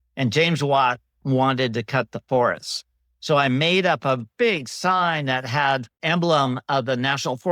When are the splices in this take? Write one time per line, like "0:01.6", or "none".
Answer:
0:06.0